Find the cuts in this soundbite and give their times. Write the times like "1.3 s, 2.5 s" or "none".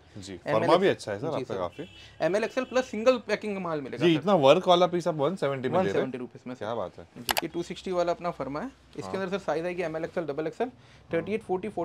7.4 s